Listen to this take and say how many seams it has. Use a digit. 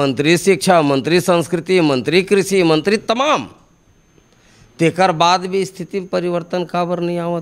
0